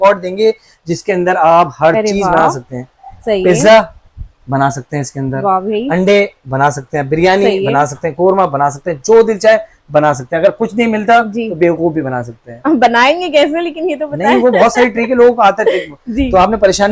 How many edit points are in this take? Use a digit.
0